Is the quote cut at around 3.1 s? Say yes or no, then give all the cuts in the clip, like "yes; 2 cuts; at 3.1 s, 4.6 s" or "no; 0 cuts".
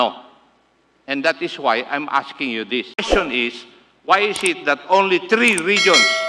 yes; 1 cut; at 3.1 s